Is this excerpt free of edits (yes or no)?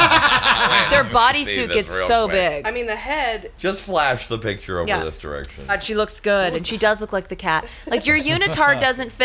no